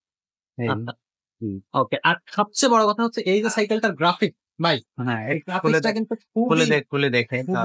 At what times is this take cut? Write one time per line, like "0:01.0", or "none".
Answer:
none